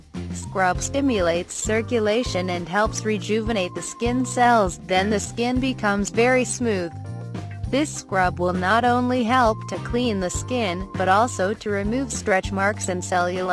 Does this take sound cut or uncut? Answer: cut